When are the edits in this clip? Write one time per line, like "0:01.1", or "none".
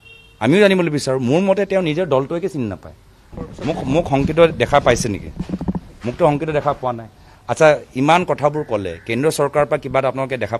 0:03.4